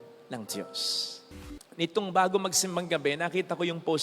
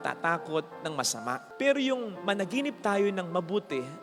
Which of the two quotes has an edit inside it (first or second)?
first